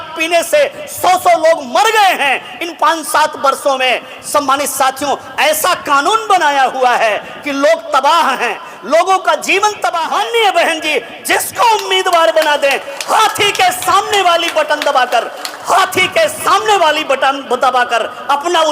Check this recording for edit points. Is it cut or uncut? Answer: cut